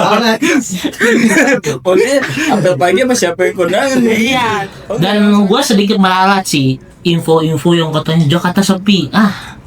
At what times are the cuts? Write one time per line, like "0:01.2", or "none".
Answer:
0:04.8